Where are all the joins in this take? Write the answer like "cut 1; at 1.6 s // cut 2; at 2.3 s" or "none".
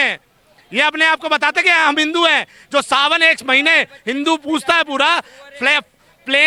none